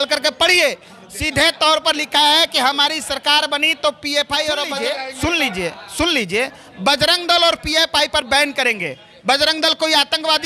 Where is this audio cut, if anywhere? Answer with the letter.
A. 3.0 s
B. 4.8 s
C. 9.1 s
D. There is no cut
B